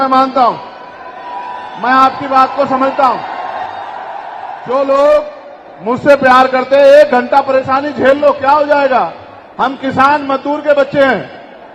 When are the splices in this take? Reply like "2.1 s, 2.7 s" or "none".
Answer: 4.4 s